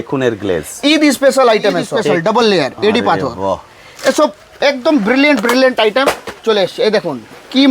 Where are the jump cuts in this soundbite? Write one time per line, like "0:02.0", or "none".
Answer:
0:02.1